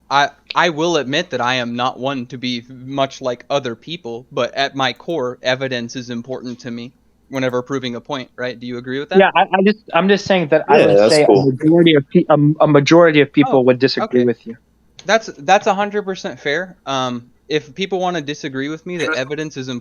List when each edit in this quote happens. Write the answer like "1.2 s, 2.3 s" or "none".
none

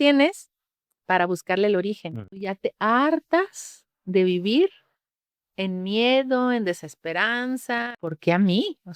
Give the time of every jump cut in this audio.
2.4 s, 8.1 s

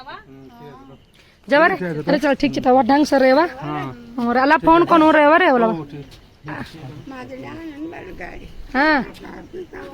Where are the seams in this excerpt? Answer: none

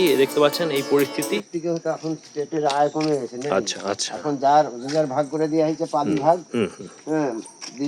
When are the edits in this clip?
1.0 s

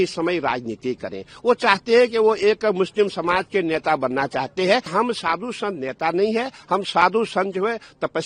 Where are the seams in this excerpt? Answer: 4.9 s

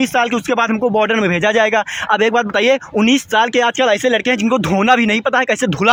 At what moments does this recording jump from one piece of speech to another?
none

